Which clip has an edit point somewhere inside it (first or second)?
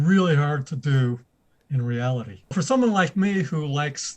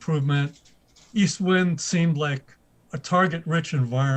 first